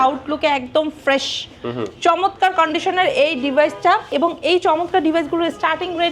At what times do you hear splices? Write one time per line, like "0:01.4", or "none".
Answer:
0:04.1